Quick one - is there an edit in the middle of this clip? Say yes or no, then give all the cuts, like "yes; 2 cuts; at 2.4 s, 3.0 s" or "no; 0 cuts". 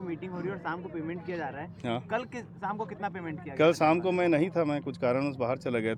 no; 0 cuts